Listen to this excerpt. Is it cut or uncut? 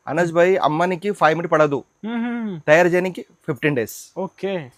uncut